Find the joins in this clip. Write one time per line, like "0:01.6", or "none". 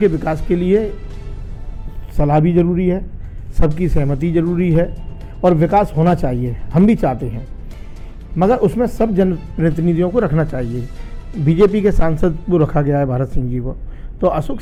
none